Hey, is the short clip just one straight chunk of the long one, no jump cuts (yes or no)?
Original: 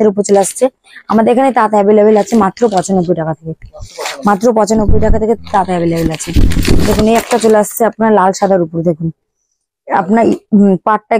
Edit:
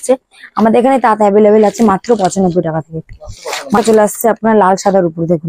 no